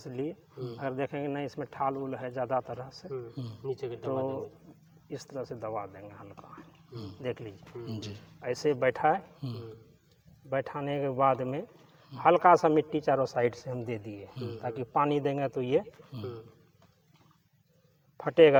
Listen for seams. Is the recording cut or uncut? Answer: uncut